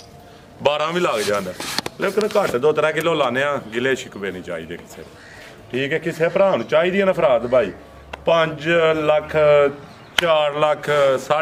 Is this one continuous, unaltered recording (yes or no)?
yes